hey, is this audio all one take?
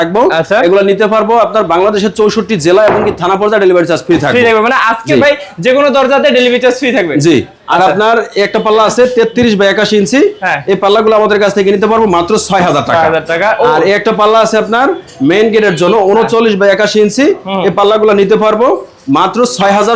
yes; 0 cuts

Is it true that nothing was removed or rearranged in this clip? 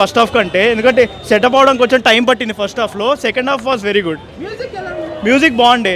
yes; 0 cuts

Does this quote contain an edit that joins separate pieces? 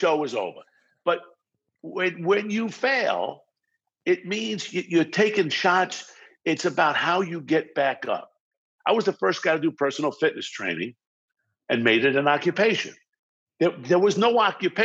yes; 1 cut; at 8.6 s

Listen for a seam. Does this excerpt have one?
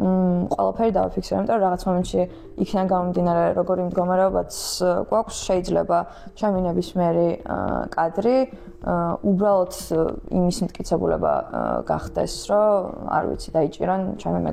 no; 0 cuts

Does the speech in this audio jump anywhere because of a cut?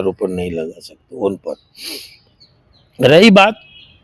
no; 0 cuts

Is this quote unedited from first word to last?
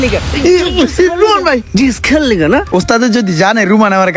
no; 1 cut; at 2.7 s

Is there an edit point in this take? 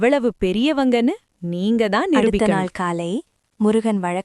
yes; 1 cut; at 2.4 s

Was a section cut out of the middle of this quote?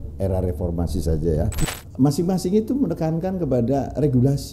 yes; 1 cut; at 1.5 s

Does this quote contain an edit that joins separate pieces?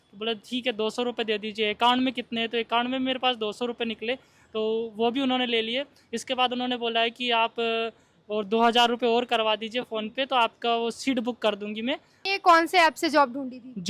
yes; 1 cut; at 12.2 s

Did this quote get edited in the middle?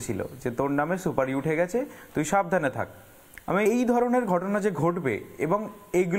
yes; 1 cut; at 3.7 s

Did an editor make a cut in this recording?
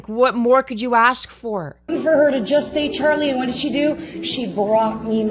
yes; 1 cut; at 1.8 s

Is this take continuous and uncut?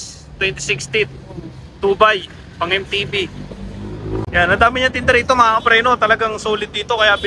no; 1 cut; at 4.3 s

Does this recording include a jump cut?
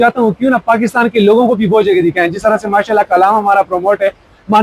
no; 0 cuts

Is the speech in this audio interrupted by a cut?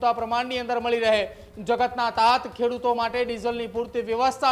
no; 0 cuts

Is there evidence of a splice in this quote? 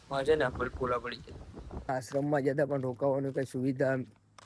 yes; 1 cut; at 1.9 s

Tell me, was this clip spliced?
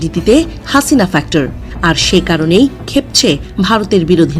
yes; 1 cut; at 1.6 s

